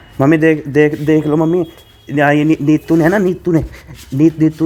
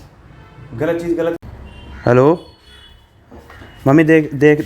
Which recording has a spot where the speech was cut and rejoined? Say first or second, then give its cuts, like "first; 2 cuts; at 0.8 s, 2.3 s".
second; 1 cut; at 1.4 s